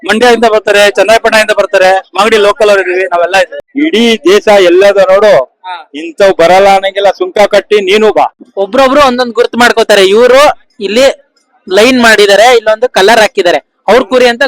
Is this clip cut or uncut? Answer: cut